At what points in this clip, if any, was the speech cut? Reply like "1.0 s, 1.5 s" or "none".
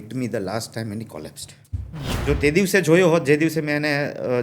2.1 s